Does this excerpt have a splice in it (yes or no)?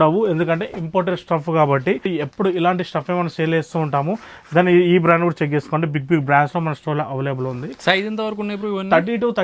no